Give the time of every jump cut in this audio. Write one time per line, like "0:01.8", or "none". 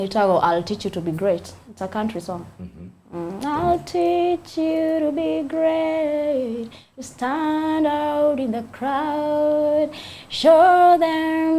none